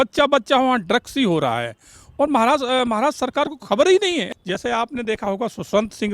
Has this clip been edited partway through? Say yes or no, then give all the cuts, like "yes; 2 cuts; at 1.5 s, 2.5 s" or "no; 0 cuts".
yes; 1 cut; at 4.3 s